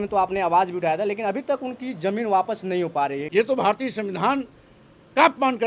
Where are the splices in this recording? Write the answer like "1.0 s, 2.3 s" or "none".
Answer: 3.2 s